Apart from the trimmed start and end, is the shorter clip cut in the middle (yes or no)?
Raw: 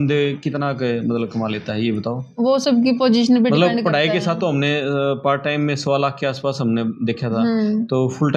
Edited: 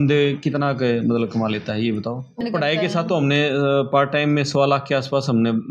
yes